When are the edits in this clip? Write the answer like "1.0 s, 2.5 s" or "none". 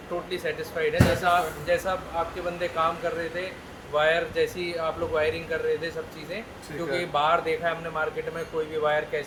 none